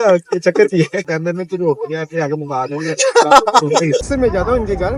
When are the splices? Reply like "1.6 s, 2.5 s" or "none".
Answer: 1.1 s, 4.1 s